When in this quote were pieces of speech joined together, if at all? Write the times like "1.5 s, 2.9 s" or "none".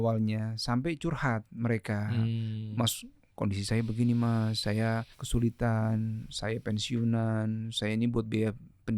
5.2 s